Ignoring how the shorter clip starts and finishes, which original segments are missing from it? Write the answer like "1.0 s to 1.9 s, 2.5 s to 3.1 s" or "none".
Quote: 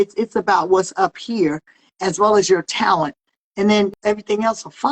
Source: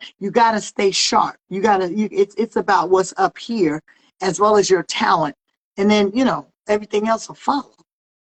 6.1 s to 6.5 s

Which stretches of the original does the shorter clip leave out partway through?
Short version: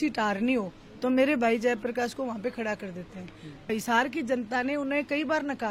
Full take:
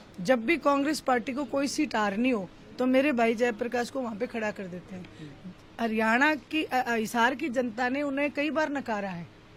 5.4 s to 6.9 s

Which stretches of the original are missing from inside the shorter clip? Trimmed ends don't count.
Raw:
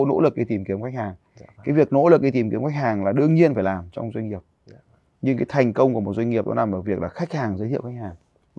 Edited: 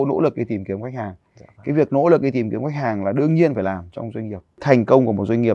4.6 s to 5.5 s

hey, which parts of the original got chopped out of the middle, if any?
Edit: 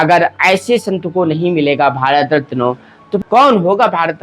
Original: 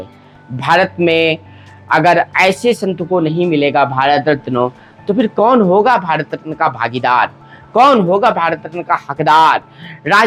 5.1 s to 7.6 s

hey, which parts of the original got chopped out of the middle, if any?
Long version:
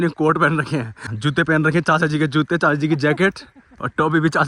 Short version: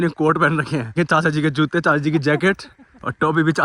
1.0 s to 1.7 s

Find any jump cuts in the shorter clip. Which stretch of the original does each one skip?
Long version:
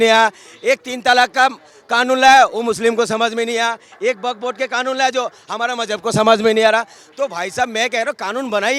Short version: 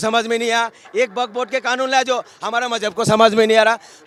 none

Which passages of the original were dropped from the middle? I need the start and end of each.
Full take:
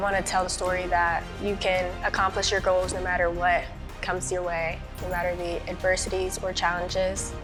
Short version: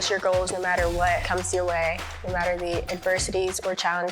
3.7 s to 4.0 s

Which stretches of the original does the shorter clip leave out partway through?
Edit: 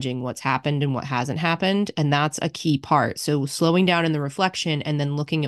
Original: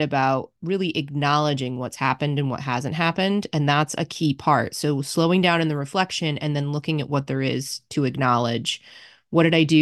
none

